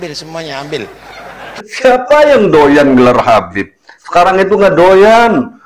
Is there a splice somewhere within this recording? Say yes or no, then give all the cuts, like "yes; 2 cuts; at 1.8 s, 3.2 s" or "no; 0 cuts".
yes; 1 cut; at 1.6 s